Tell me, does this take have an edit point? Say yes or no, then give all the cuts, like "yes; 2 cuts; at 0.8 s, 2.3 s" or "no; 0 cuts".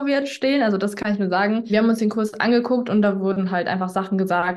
no; 0 cuts